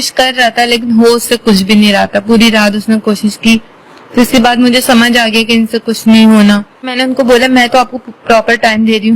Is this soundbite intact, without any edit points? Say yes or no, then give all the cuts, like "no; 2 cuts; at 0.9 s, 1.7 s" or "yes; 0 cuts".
no; 1 cut; at 6.9 s